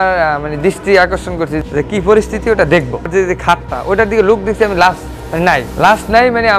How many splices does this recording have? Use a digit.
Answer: 2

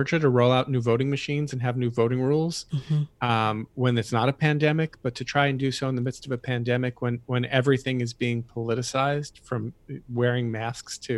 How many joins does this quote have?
0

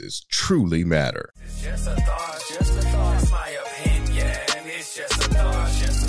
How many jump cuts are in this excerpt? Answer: 1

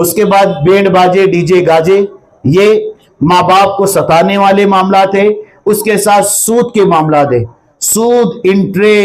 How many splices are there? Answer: 0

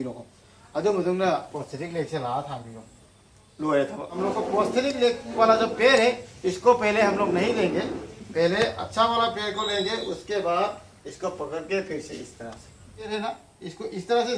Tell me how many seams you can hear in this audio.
2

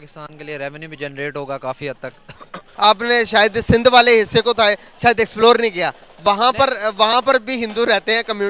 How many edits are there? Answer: 1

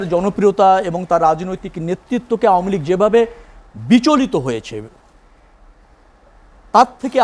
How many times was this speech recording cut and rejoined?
0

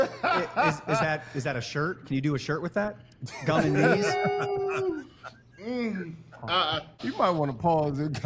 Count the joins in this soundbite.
1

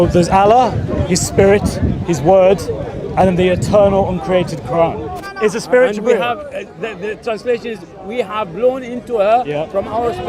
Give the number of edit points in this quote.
1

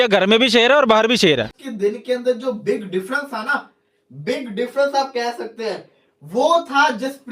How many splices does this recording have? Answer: 1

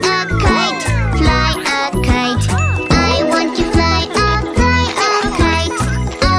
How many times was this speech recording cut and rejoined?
0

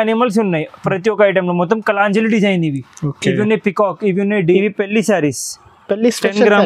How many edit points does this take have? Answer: 1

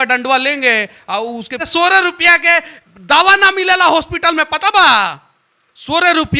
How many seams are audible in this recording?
1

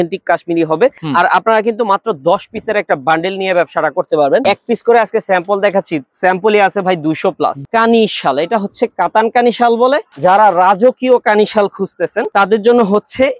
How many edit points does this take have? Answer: 5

